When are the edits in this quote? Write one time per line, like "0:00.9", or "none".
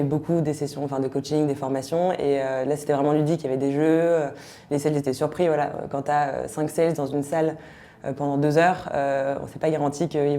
none